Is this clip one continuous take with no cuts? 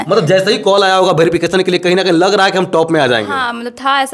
yes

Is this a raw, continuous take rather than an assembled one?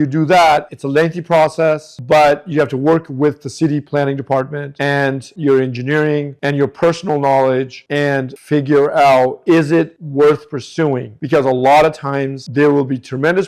yes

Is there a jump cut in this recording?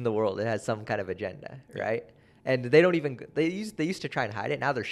no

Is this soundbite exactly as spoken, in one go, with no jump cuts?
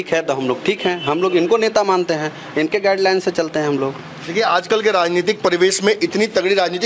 yes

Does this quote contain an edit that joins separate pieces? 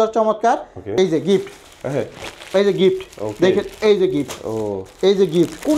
yes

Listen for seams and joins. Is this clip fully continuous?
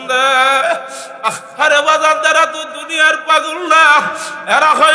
yes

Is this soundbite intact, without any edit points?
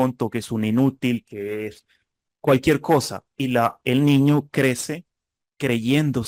yes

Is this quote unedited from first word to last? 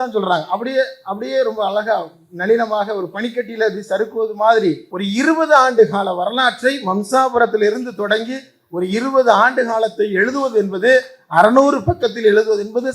no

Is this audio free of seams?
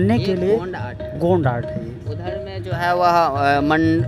yes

